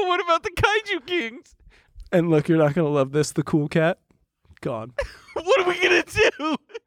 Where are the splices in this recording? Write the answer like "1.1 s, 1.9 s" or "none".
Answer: 4.9 s